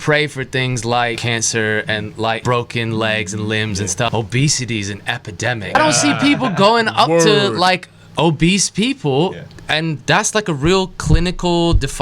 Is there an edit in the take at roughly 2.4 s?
yes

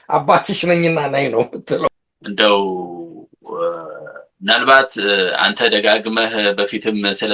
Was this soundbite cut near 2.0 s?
yes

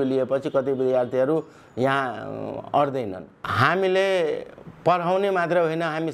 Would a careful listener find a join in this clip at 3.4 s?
yes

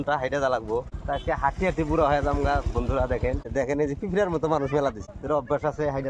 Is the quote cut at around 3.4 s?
yes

